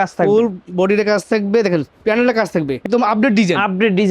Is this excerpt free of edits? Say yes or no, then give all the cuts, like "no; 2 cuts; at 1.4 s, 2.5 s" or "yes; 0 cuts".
no; 1 cut; at 2.8 s